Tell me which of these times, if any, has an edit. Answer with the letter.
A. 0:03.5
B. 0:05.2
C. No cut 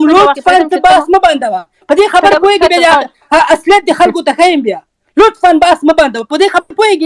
C